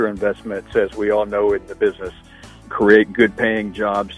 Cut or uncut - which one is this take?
cut